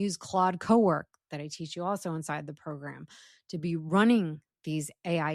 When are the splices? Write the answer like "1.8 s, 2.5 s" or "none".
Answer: none